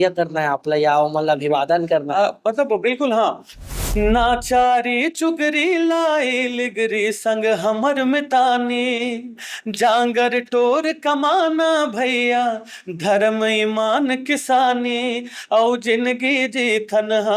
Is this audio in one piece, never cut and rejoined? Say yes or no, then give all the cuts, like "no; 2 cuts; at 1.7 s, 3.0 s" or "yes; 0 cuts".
no; 1 cut; at 3.7 s